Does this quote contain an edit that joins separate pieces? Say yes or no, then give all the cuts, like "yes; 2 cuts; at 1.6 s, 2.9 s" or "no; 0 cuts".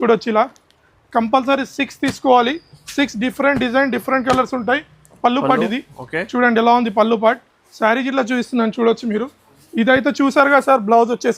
yes; 1 cut; at 5.2 s